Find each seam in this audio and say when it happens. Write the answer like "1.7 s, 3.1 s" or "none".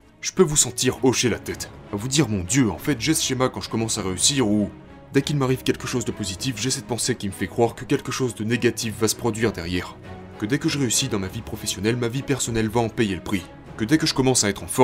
none